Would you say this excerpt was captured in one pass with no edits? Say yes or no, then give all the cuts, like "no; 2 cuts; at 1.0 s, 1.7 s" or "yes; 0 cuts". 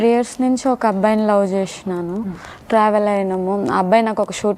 yes; 0 cuts